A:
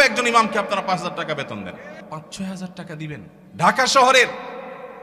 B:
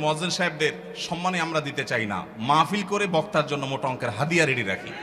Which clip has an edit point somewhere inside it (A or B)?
A